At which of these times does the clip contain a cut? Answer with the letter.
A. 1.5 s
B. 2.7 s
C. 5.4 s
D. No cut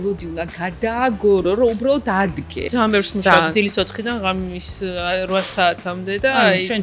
B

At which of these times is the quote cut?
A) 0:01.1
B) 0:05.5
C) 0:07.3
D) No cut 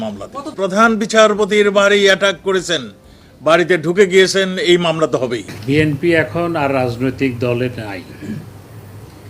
B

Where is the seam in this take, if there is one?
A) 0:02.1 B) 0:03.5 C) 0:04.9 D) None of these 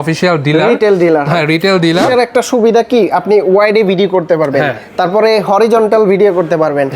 A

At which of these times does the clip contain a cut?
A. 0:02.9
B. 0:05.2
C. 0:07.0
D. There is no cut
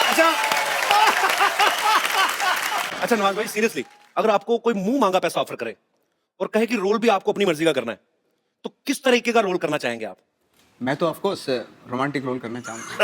A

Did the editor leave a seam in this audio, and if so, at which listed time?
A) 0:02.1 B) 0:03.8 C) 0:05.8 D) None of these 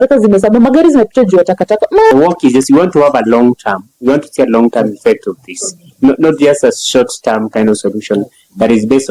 A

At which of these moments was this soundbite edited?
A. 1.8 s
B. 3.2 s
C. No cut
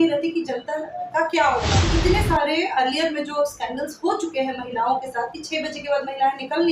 A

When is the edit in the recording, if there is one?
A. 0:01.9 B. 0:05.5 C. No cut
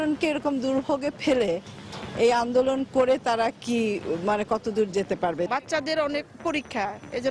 B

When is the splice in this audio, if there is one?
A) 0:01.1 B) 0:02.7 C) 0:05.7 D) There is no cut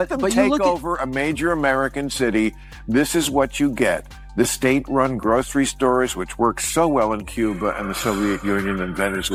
D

